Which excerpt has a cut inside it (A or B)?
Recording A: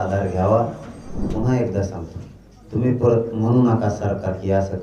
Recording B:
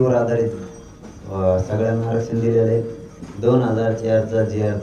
A